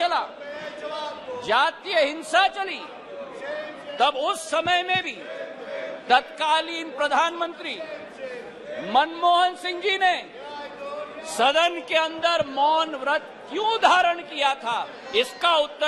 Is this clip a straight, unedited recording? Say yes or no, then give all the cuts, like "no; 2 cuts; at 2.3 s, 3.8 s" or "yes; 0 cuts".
yes; 0 cuts